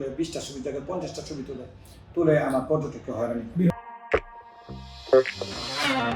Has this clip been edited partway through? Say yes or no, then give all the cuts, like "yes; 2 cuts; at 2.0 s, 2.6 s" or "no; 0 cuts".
yes; 1 cut; at 3.7 s